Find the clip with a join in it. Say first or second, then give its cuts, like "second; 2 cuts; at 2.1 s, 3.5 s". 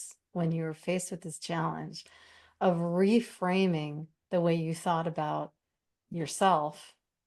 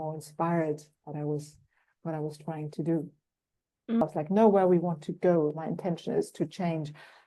second; 1 cut; at 4.0 s